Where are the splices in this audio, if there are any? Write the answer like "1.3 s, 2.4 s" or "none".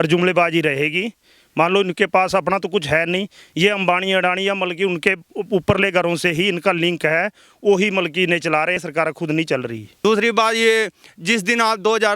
8.8 s, 9.8 s